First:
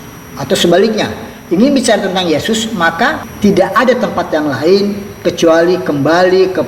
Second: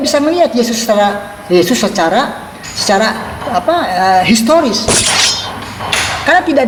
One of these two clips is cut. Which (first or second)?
first